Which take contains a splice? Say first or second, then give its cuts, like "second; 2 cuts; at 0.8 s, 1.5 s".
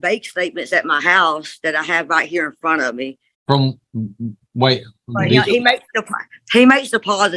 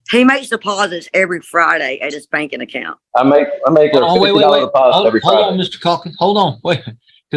first; 1 cut; at 3.3 s